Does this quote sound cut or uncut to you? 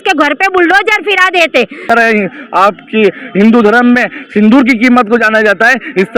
cut